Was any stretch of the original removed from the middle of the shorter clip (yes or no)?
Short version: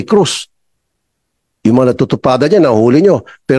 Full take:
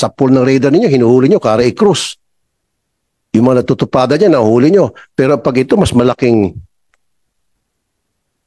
no